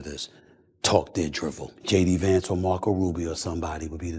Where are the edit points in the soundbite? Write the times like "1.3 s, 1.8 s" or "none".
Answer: 1.7 s